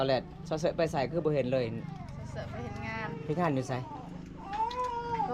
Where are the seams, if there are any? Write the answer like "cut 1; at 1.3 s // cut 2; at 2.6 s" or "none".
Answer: none